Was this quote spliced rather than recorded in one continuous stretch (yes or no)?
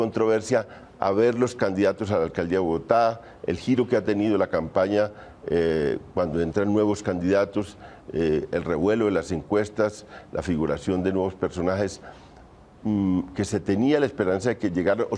yes